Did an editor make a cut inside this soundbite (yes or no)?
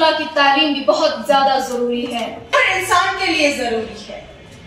yes